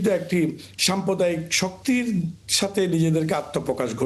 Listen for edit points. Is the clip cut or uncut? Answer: uncut